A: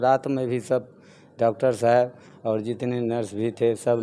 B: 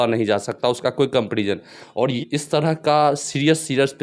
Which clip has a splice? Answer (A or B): B